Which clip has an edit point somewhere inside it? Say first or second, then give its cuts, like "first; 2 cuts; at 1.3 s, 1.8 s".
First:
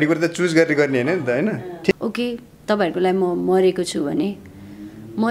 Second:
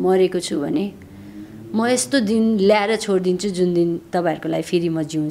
first; 1 cut; at 1.9 s